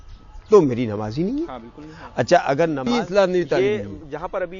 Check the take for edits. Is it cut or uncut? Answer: cut